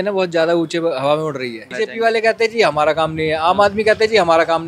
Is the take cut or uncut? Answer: cut